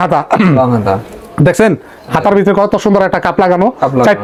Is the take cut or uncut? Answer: uncut